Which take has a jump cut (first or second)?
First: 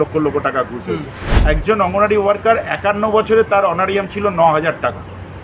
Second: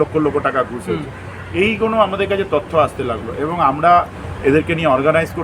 first